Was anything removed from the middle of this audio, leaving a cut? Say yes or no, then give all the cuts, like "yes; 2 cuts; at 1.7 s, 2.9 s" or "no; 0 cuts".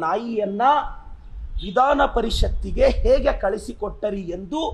no; 0 cuts